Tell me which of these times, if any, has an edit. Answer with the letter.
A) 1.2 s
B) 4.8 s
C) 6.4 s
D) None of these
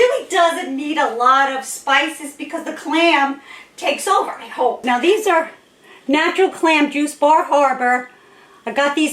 B